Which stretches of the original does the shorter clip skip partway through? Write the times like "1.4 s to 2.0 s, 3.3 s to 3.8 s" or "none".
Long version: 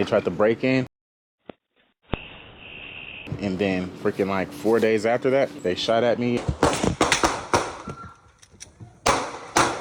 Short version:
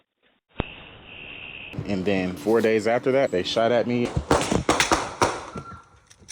3.9 s to 4.6 s, 5.5 s to 5.6 s